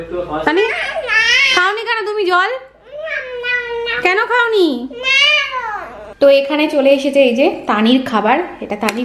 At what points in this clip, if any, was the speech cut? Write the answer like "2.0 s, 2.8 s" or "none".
none